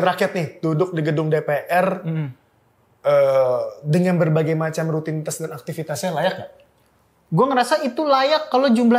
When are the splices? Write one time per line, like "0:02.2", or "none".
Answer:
none